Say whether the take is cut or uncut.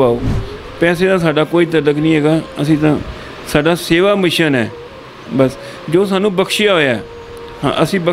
uncut